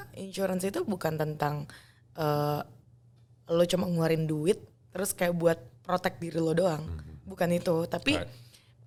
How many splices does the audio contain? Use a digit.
0